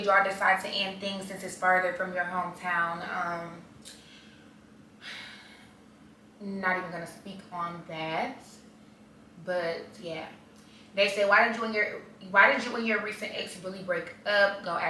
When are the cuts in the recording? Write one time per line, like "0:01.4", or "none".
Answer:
none